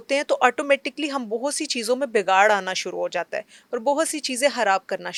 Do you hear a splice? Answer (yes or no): no